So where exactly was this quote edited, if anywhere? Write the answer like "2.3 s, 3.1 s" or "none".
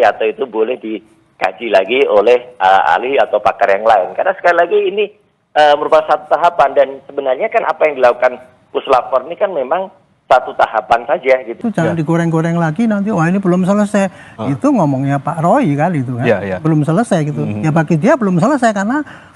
11.6 s